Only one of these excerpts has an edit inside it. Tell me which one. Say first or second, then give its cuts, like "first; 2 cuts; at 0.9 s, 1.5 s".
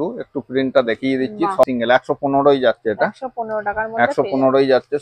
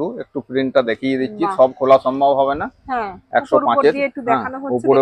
first; 1 cut; at 1.7 s